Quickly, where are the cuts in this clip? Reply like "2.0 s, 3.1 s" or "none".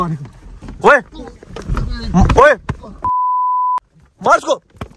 3.4 s